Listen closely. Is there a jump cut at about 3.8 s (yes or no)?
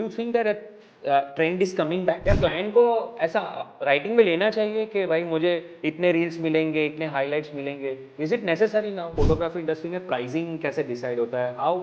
no